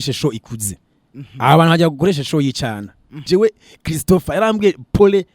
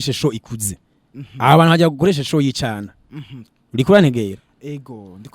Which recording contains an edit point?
first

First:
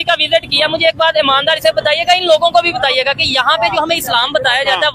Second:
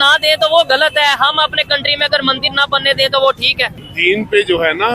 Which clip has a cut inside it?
second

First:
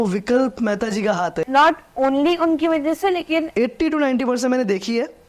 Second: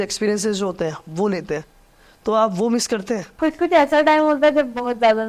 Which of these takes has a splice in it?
first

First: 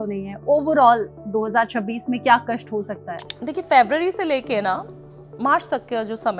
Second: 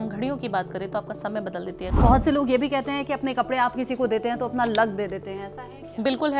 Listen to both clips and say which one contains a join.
second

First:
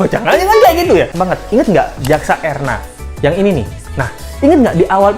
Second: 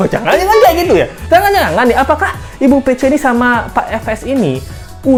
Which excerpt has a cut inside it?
first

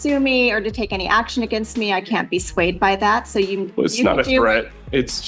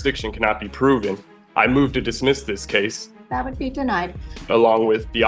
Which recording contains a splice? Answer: second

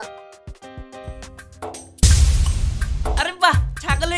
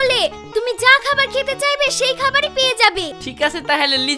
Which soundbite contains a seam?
second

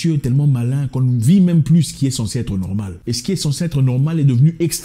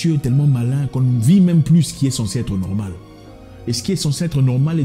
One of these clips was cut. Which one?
first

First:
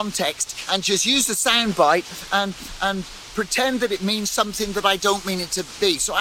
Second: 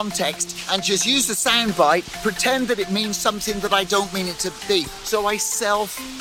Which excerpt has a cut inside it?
second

